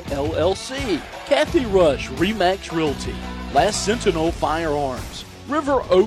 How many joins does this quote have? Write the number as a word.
one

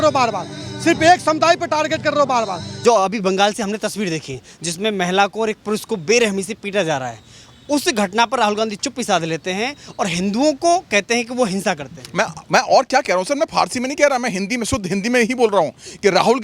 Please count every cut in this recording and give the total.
one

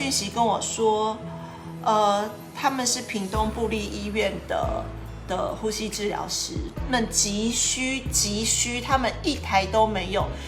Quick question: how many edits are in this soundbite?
zero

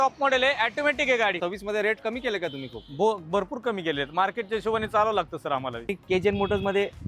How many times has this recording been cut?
two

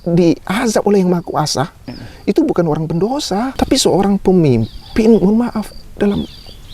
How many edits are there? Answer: one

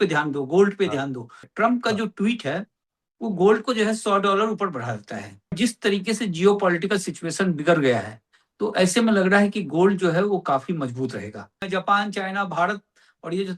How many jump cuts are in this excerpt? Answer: three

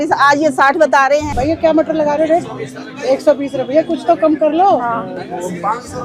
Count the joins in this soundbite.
one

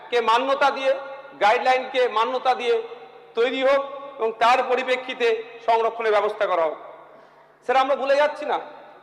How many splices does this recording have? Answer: zero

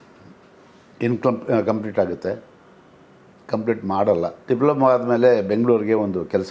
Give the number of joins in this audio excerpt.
one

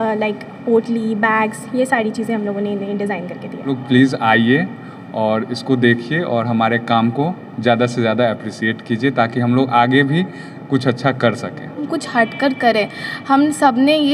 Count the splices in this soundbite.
two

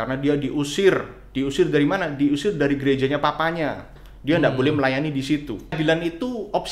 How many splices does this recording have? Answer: one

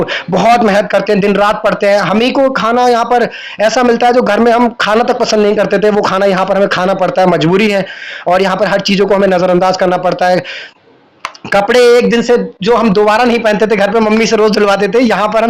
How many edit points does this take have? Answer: zero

